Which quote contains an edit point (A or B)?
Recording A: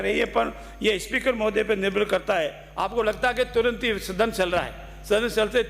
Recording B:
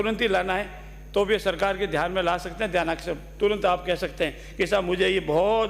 A